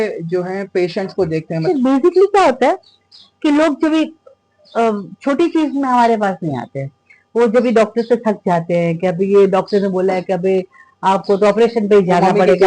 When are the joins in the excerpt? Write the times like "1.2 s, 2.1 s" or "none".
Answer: 1.6 s